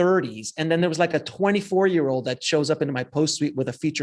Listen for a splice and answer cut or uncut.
uncut